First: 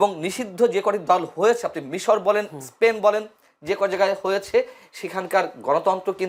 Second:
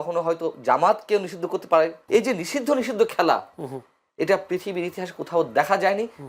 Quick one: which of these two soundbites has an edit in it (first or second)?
second